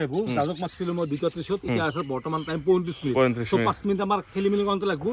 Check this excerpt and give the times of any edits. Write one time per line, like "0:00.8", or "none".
none